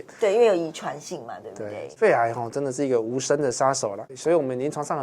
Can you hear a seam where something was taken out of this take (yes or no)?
yes